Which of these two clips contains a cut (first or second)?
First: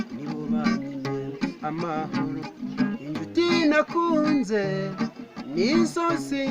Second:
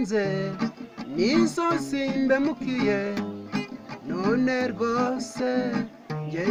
first